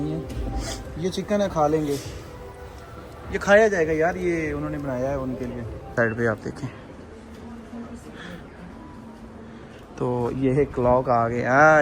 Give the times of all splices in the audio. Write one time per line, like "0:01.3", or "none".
0:05.9